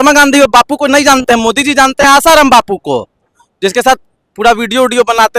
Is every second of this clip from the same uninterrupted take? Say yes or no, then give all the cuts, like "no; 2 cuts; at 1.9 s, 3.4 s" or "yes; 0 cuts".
yes; 0 cuts